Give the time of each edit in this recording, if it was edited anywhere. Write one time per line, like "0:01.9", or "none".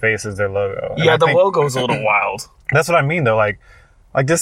none